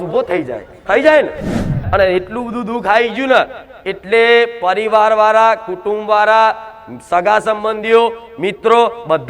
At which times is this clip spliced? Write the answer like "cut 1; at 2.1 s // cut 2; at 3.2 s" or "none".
cut 1; at 1.7 s

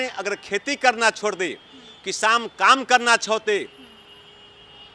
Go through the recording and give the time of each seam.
none

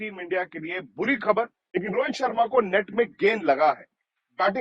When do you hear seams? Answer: cut 1; at 1.6 s

